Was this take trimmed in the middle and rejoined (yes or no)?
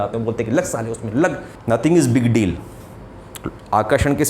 yes